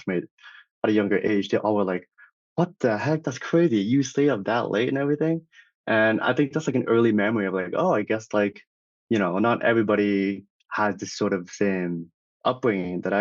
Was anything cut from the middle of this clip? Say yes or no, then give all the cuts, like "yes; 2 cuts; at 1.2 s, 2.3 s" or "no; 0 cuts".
yes; 1 cut; at 12.2 s